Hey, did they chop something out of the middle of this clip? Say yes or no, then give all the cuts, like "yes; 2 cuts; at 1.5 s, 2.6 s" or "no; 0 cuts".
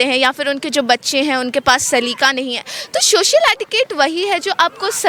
no; 0 cuts